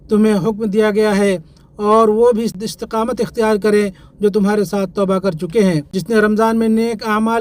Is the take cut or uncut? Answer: cut